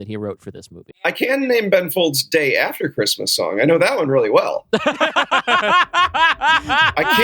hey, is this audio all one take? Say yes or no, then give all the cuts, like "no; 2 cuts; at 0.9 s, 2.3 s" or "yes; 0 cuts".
no; 1 cut; at 1.0 s